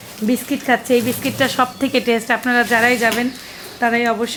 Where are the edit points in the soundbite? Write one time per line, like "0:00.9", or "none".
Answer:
none